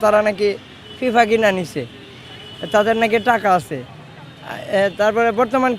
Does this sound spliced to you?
no; 0 cuts

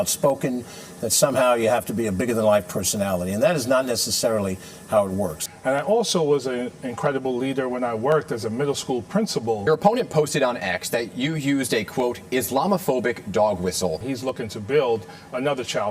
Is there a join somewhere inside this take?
yes; 3 cuts; at 5.4 s, 9.6 s, 14.0 s

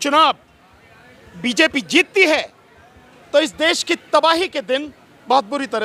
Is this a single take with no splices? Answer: yes; 0 cuts

